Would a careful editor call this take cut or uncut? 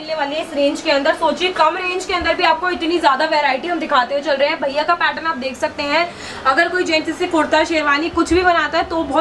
uncut